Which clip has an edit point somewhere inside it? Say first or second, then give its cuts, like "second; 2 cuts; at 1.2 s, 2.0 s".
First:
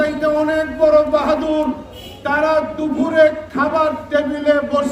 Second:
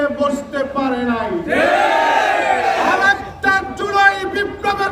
second; 1 cut; at 2.6 s